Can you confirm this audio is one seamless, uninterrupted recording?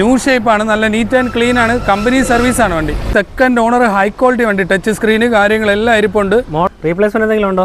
no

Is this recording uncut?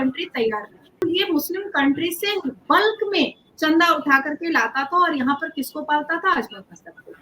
no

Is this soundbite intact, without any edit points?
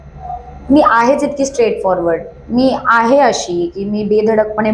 yes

